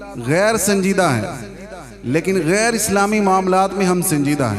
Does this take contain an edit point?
no; 0 cuts

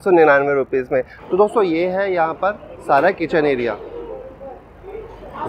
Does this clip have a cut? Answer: yes; 1 cut; at 1.1 s

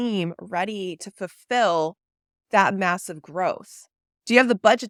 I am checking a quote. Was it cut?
no; 0 cuts

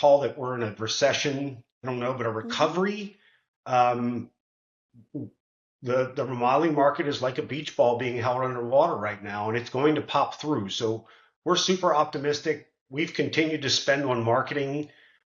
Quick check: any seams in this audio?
yes; 1 cut; at 1.7 s

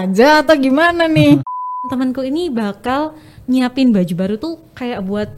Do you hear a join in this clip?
yes; 1 cut; at 1.8 s

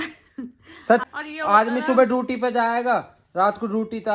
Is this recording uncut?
no; 1 cut; at 1.0 s

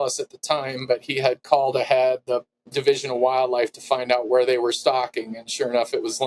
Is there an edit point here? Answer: yes; 1 cut; at 2.5 s

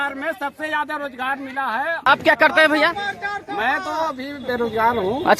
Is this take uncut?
no; 1 cut; at 2.1 s

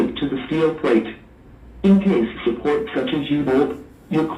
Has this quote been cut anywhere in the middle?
yes; 1 cut; at 1.1 s

